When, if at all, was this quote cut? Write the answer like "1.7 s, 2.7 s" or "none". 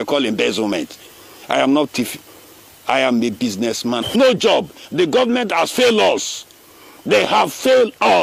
4.1 s